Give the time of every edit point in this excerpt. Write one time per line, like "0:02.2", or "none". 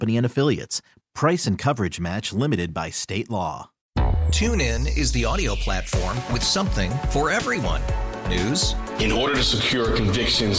0:03.7